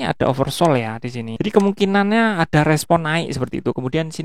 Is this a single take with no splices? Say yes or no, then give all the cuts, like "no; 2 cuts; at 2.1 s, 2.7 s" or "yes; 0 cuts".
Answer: no; 1 cut; at 1.2 s